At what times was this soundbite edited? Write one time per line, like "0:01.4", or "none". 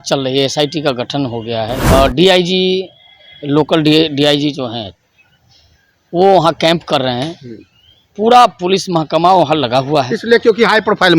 0:01.8